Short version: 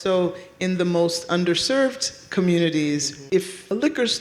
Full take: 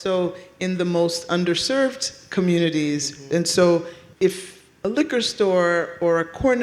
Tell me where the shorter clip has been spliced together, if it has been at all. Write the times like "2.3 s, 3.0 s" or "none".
3.2 s